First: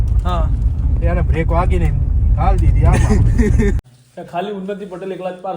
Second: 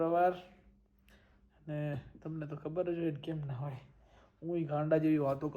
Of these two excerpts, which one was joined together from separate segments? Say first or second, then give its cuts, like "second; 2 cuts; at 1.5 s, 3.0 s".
first; 1 cut; at 3.8 s